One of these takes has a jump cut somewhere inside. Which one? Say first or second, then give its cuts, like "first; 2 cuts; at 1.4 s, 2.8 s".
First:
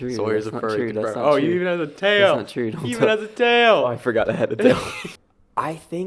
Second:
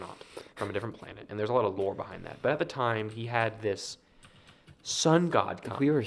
first; 1 cut; at 5.0 s